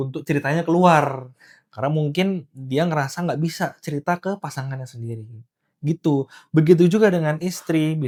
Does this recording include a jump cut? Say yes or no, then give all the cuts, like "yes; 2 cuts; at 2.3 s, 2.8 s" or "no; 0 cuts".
no; 0 cuts